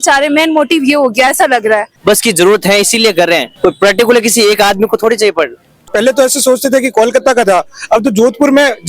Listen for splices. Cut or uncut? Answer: cut